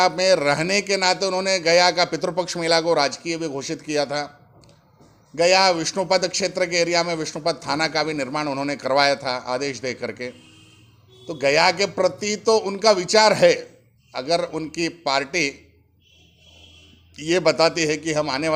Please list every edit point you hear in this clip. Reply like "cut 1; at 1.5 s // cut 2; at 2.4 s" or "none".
none